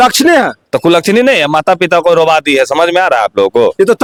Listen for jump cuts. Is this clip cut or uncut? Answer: uncut